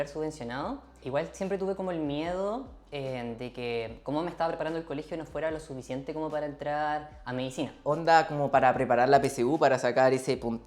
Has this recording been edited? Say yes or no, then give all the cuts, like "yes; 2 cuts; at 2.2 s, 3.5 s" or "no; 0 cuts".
yes; 2 cuts; at 1.0 s, 7.8 s